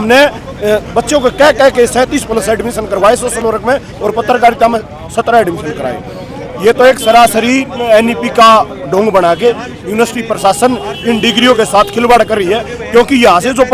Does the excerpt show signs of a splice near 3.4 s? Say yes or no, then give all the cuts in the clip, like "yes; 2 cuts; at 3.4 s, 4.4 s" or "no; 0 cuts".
no; 0 cuts